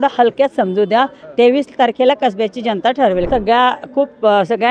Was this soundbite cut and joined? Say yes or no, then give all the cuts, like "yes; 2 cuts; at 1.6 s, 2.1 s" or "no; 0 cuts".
yes; 1 cut; at 3.3 s